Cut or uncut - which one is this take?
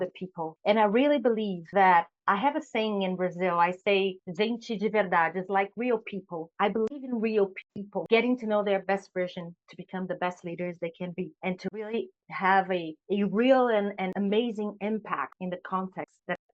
cut